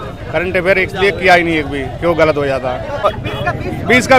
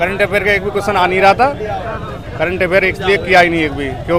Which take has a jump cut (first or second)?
first